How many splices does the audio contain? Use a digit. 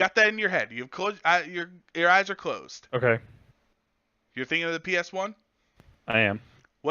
1